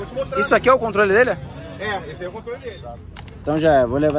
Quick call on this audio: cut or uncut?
cut